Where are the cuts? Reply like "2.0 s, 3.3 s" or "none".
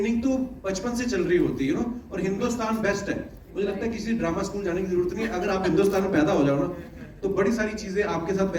none